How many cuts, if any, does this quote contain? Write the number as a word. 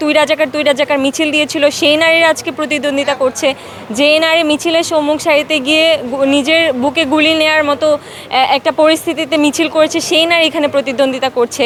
zero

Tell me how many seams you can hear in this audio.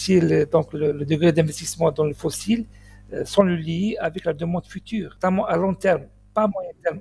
one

